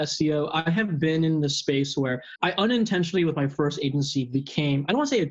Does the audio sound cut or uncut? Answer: cut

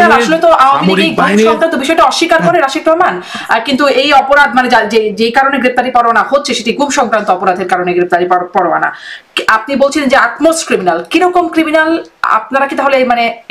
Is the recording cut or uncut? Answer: uncut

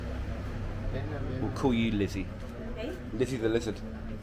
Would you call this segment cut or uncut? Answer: uncut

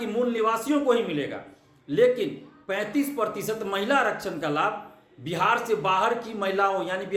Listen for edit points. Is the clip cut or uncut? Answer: uncut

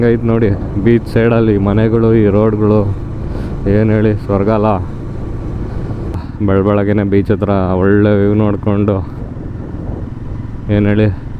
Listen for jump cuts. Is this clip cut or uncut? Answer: cut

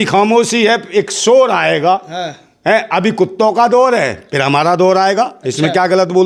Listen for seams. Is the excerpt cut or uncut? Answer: uncut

